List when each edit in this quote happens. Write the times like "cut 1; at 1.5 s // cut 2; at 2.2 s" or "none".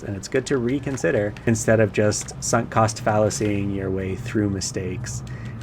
cut 1; at 1.4 s